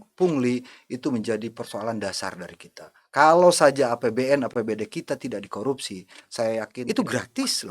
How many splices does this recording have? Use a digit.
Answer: 1